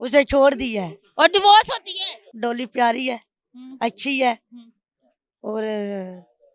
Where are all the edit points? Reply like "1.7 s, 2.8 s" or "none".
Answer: 2.3 s

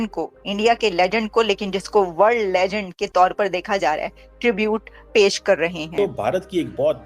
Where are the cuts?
5.8 s

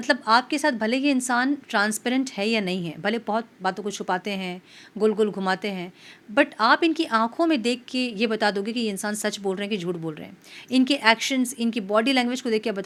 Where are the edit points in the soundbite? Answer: none

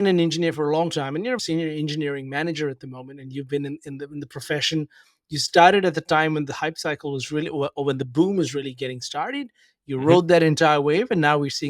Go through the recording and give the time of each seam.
1.4 s

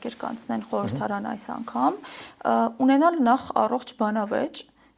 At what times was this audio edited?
none

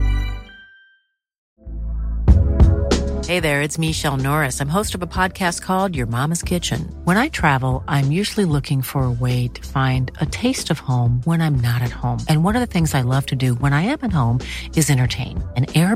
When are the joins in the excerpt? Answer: 1.3 s

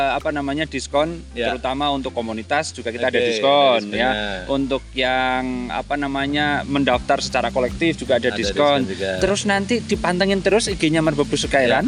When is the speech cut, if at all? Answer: none

